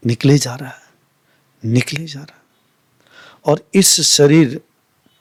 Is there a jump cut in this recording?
no; 0 cuts

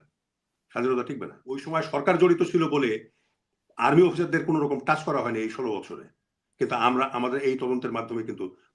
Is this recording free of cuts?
no; 1 cut; at 1.7 s

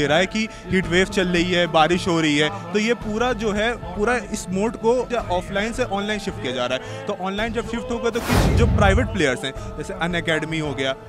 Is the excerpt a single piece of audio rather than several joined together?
no; 1 cut; at 5.1 s

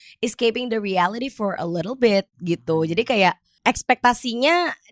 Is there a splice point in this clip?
yes; 1 cut; at 3.5 s

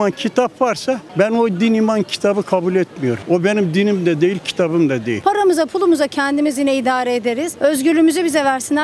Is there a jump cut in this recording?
yes; 1 cut; at 5.2 s

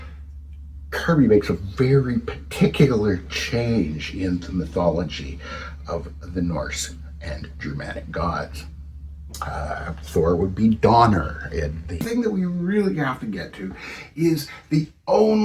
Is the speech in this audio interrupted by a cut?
yes; 1 cut; at 12.0 s

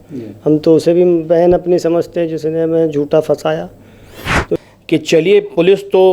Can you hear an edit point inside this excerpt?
yes; 1 cut; at 4.6 s

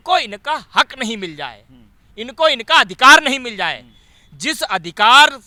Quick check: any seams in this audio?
no; 0 cuts

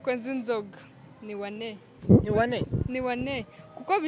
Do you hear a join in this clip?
no; 0 cuts

